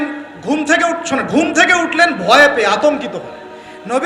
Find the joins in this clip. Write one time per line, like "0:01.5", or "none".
none